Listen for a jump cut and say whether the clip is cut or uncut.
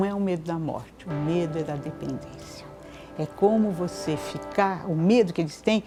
uncut